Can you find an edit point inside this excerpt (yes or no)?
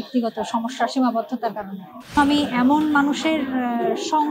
yes